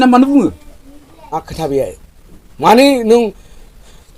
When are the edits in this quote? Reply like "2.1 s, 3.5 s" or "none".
1.3 s